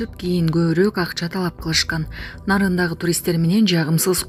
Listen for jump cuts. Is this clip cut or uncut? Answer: uncut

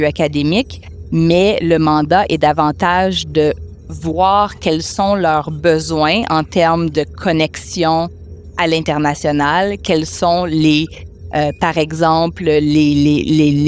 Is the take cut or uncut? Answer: uncut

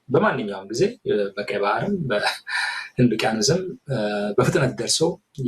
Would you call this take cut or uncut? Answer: uncut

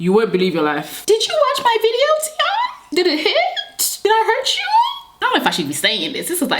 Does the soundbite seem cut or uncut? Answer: cut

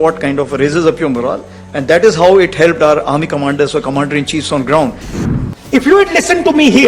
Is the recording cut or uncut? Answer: cut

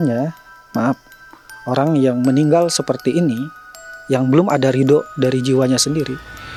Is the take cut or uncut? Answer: uncut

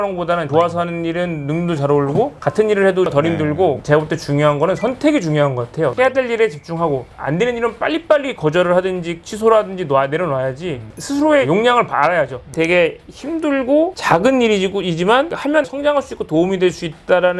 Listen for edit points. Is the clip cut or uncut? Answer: cut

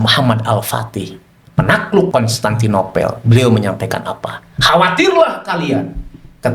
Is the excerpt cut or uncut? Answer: cut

